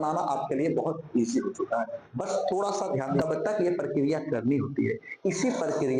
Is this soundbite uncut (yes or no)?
no